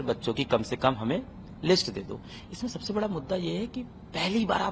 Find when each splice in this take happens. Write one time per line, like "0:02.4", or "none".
none